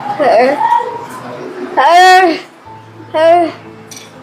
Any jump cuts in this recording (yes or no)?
no